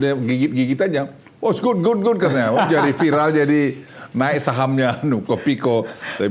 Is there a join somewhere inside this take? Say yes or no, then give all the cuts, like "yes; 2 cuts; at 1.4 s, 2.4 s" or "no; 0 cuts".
no; 0 cuts